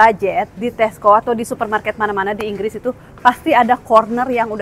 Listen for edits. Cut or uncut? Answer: uncut